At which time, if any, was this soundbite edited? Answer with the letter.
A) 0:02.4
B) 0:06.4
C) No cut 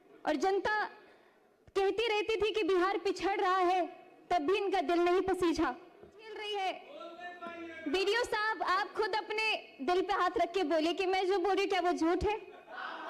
B